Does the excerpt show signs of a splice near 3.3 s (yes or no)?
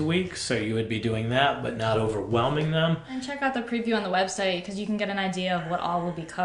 yes